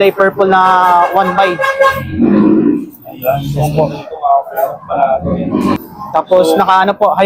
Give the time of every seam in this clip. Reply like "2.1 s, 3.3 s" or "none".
5.8 s